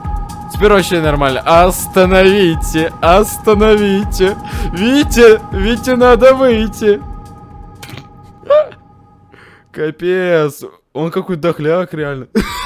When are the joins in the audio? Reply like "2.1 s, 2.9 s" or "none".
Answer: none